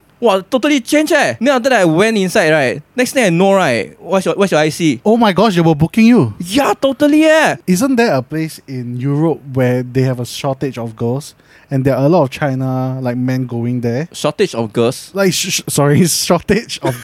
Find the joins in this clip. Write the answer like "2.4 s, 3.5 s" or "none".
1.3 s, 7.6 s